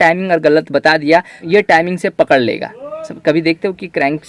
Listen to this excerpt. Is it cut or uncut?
cut